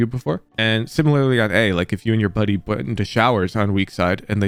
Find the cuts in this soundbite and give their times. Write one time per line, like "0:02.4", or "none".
none

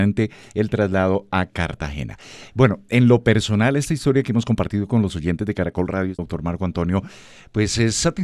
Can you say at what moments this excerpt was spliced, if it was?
0:06.2

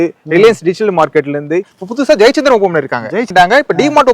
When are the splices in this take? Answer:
0:01.7
0:03.2

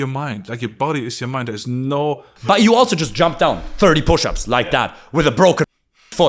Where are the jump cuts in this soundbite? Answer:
0:02.3

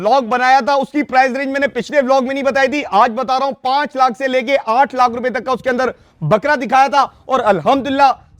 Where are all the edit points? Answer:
none

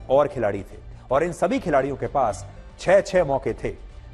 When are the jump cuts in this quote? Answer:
none

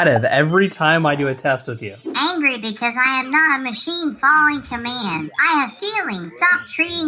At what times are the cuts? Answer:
none

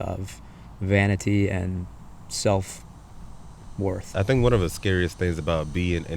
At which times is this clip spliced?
0:04.1

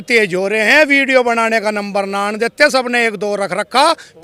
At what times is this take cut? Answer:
none

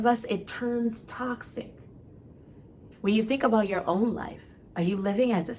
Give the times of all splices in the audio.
0:02.9

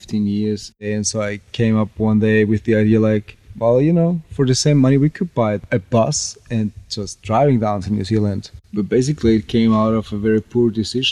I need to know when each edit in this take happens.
0:00.9
0:05.6
0:08.6

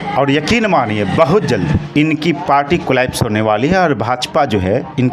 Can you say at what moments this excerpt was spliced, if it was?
none

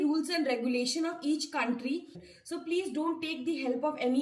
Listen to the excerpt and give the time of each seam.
0:02.2

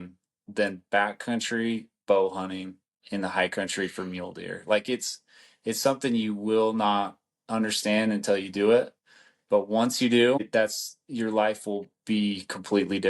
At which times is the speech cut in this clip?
0:10.5

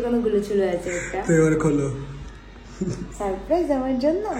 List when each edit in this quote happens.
none

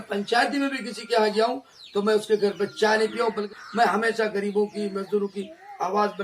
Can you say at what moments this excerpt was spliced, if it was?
0:03.5

